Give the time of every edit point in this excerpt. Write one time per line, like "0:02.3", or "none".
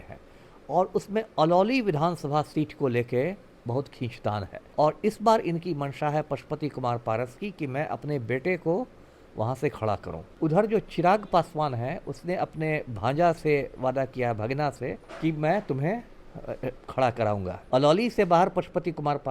0:04.6
0:10.2
0:15.0
0:17.5